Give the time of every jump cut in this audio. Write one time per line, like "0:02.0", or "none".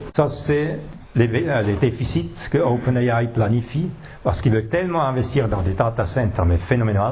none